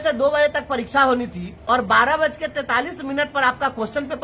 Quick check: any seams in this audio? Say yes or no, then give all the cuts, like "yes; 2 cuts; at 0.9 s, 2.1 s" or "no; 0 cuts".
yes; 1 cut; at 0.9 s